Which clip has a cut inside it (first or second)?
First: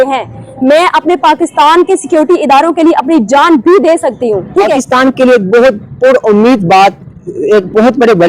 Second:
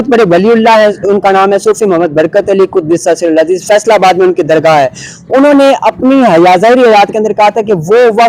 first